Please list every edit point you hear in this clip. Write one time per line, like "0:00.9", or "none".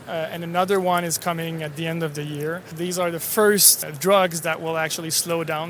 0:02.7
0:03.8

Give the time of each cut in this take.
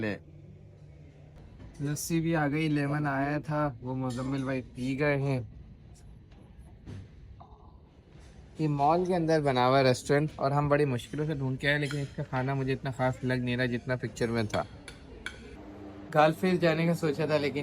0:01.4
0:15.9

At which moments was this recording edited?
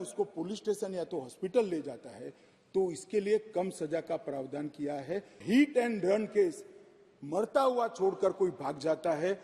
0:05.4

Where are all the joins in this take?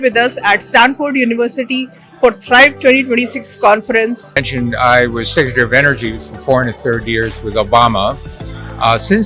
0:04.4

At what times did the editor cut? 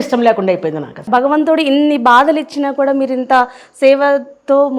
0:01.0

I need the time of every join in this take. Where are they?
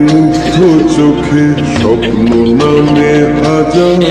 none

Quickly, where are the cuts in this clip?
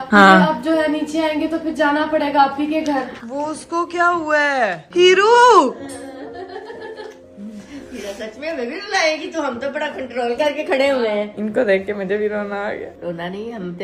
0:03.1
0:04.8
0:11.3

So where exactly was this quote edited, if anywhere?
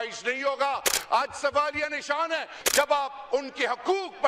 0:02.6

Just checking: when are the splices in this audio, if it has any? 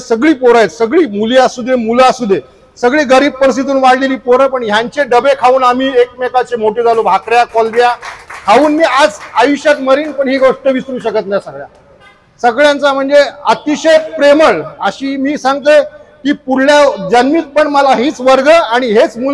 none

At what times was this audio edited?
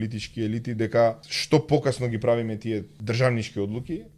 0:01.3
0:02.9

